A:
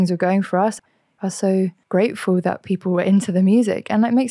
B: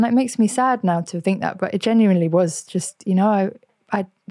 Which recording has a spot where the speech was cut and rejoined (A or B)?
A